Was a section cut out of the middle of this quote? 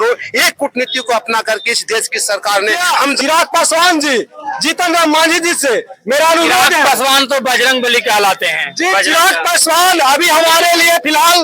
yes; 1 cut; at 3.0 s

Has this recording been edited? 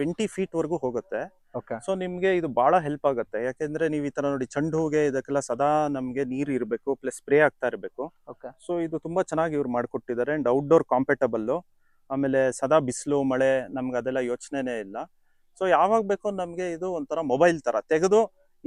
no; 0 cuts

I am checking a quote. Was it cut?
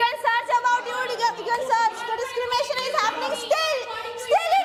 no; 0 cuts

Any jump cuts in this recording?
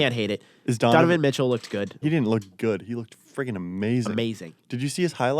yes; 1 cut; at 2.0 s

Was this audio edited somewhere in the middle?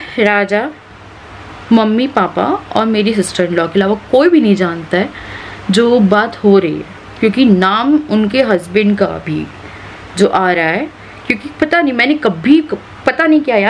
no; 0 cuts

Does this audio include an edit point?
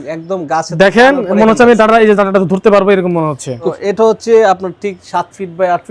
yes; 1 cut; at 3.7 s

